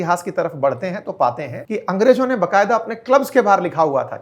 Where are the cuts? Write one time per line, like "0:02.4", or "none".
0:01.5